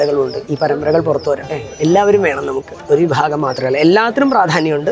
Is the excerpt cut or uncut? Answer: cut